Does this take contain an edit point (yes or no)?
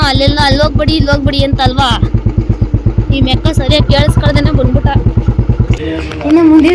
yes